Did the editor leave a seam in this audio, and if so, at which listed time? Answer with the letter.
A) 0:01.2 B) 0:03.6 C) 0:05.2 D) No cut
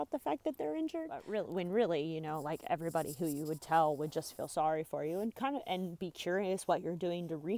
A